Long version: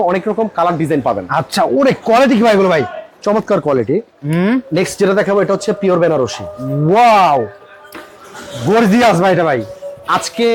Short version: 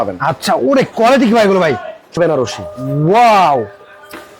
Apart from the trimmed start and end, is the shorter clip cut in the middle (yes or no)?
yes